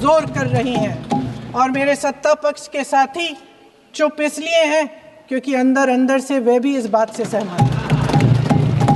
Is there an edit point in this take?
no; 0 cuts

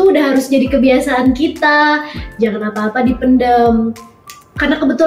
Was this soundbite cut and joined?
no; 0 cuts

